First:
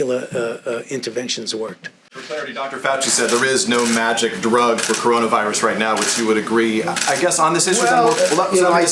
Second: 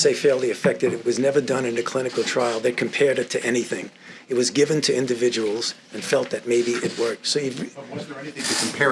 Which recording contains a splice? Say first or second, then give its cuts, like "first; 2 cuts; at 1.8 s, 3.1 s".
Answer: first; 1 cut; at 2.1 s